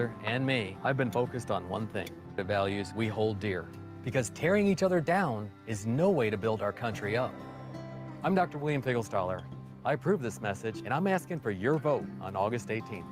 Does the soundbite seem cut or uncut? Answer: cut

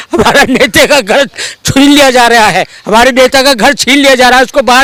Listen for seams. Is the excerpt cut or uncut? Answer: uncut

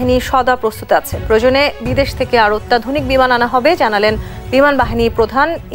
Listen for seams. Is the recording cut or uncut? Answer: uncut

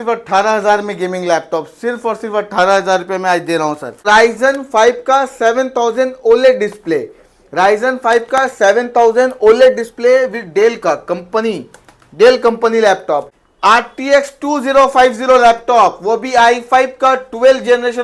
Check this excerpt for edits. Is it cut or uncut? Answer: cut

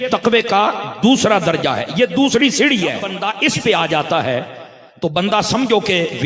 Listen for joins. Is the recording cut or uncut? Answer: cut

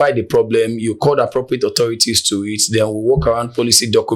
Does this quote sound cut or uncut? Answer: uncut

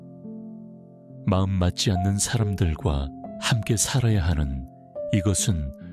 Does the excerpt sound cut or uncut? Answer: uncut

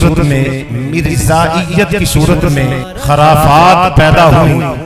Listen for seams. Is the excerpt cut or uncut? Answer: cut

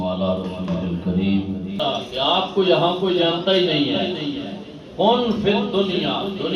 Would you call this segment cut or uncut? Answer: cut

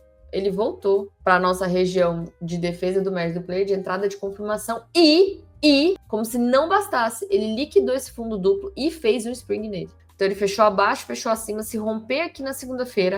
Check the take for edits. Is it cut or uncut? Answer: uncut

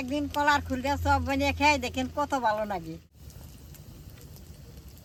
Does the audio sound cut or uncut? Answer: uncut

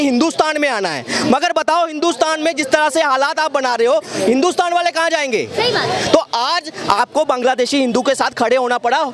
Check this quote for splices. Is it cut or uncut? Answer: uncut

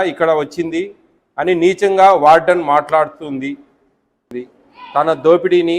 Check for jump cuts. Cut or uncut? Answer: cut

